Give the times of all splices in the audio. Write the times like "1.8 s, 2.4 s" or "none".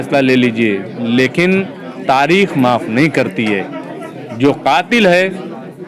none